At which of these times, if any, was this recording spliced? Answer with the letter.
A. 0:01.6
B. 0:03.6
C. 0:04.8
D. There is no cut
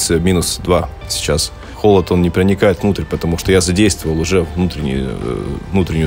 A